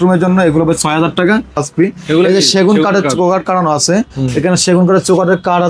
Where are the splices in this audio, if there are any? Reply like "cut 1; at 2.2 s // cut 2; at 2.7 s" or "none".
cut 1; at 1.6 s